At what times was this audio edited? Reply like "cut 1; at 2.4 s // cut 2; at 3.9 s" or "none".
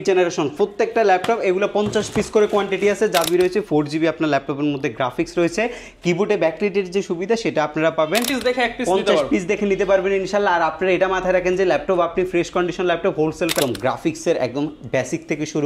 cut 1; at 3.3 s // cut 2; at 8.3 s // cut 3; at 13.5 s